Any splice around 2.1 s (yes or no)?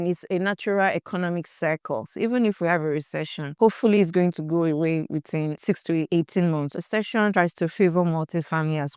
yes